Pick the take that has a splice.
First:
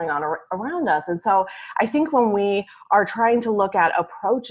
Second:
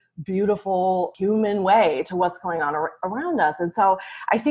second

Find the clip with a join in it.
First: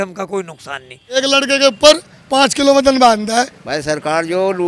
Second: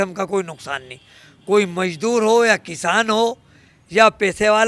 first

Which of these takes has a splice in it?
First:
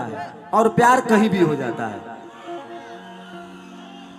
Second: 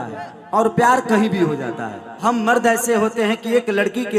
second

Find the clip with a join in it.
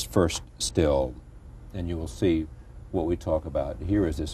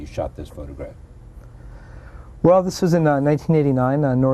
second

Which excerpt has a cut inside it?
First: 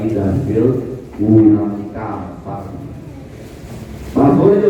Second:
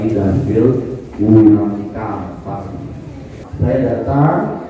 second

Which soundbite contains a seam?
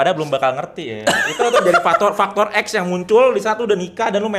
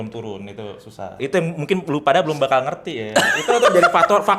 second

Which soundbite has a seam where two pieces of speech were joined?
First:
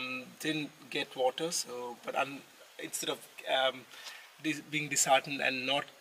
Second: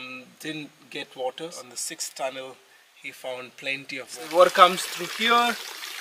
second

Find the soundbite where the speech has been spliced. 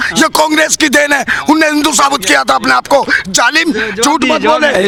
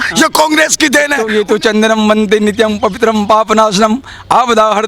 second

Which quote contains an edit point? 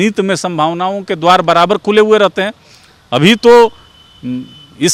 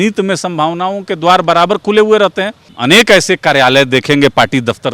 second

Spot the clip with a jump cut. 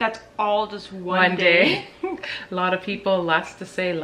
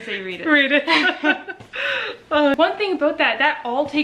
second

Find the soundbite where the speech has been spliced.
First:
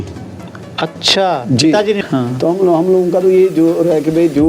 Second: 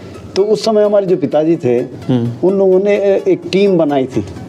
first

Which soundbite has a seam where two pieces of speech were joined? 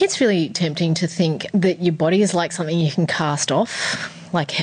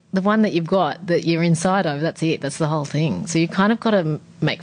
first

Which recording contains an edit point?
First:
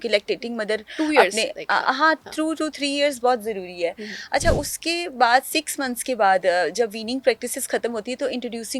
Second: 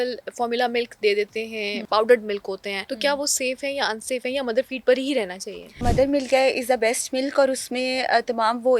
second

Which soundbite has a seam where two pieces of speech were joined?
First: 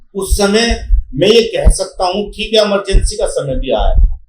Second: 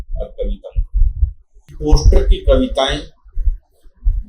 second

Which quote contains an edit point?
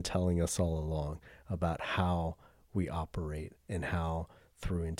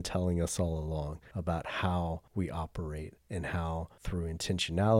second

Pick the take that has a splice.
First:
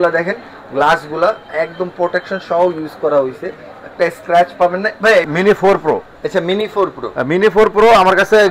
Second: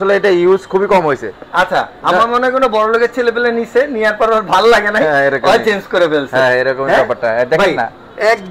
first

